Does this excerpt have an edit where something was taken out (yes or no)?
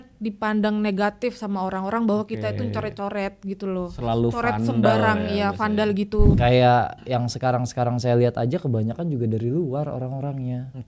yes